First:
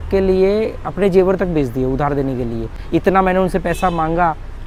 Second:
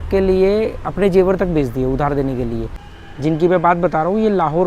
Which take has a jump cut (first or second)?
second